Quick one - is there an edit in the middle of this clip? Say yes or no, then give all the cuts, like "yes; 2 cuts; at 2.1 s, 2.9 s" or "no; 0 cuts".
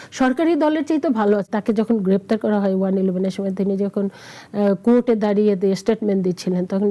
yes; 1 cut; at 1.5 s